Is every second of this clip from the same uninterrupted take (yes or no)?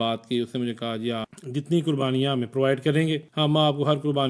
no